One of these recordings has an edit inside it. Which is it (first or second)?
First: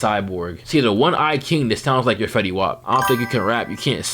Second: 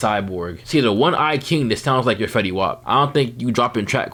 first